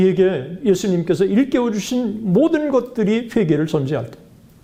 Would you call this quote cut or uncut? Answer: uncut